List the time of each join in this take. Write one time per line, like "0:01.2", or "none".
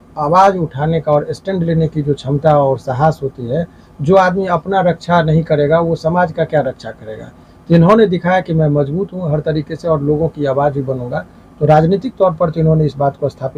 none